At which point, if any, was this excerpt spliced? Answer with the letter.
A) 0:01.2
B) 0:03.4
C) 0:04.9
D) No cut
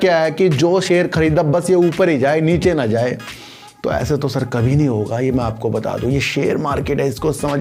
D